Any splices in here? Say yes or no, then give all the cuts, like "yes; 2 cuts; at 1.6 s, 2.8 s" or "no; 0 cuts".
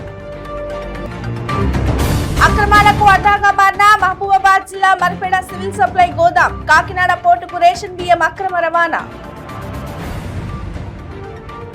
no; 0 cuts